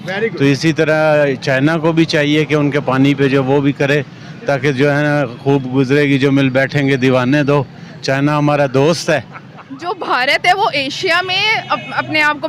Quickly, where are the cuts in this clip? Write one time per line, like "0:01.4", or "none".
0:09.7